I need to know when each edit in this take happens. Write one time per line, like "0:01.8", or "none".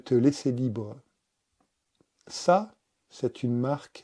0:01.8